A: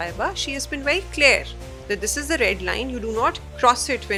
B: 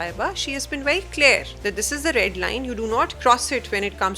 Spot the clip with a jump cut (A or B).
B